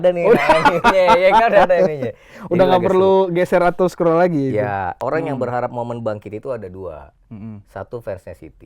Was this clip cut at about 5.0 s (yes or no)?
yes